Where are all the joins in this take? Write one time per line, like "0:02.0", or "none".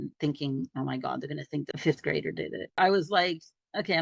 0:01.7
0:02.8